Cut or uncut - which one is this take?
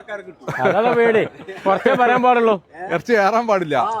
uncut